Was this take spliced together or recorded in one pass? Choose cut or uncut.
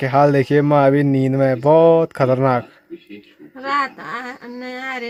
uncut